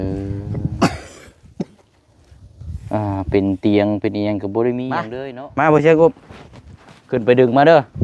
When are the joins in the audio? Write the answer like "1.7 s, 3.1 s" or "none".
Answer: 5.1 s